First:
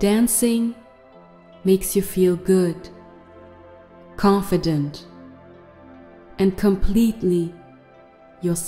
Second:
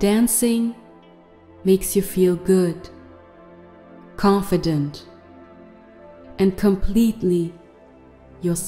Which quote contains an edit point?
second; 4 cuts; at 2.8 s, 4.2 s, 5.0 s, 6.4 s

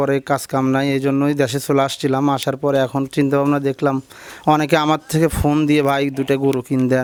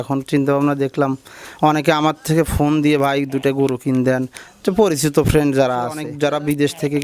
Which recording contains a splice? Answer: second; 1 cut; at 6.1 s

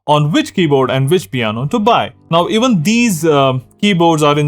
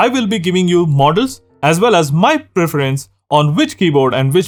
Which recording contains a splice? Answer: first; 1 cut; at 2.2 s

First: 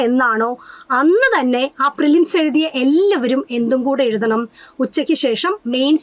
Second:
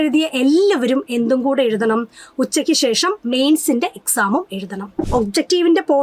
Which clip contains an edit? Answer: second; 1 cut; at 5.0 s

